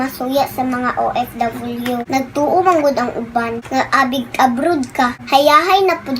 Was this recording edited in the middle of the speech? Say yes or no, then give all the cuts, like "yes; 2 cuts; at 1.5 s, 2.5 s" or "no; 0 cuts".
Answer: yes; 1 cut; at 2.0 s